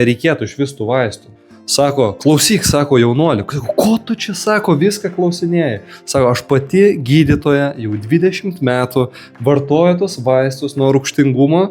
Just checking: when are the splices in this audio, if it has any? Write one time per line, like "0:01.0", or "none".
0:01.2